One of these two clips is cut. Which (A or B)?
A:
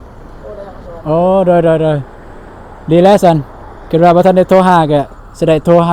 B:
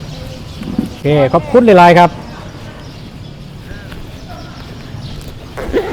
B